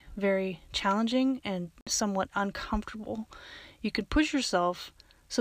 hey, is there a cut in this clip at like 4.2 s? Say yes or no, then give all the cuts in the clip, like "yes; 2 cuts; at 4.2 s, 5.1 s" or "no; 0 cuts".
no; 1 cut; at 1.9 s